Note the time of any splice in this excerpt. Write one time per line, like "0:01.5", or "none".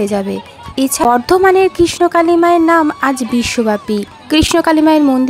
0:01.1